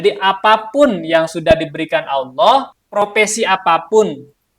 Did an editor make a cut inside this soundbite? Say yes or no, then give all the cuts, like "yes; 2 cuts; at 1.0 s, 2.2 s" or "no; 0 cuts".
yes; 1 cut; at 2.8 s